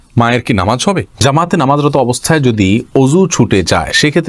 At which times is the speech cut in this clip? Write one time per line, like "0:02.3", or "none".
0:01.2